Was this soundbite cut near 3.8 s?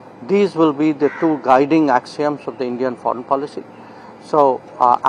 no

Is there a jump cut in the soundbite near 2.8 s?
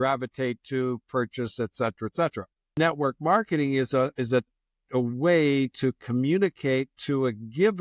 yes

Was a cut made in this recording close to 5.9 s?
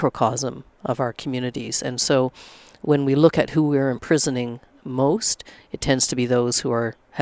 no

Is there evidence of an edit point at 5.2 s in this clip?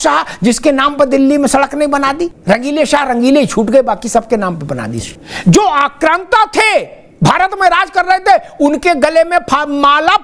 no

